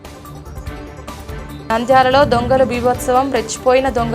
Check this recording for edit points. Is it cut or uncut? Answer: cut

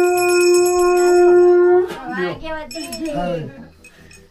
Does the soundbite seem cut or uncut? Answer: uncut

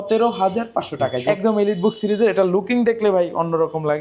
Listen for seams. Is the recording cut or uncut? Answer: cut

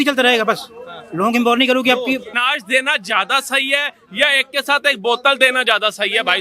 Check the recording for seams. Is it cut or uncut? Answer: cut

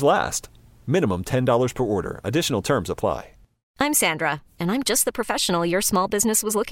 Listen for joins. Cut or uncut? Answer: cut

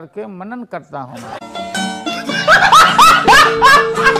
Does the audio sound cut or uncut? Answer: uncut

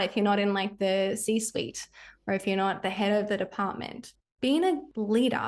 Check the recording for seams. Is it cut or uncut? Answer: uncut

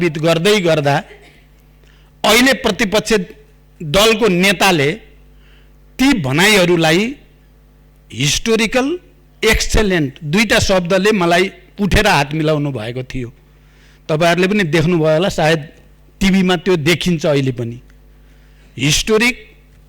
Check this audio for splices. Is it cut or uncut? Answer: uncut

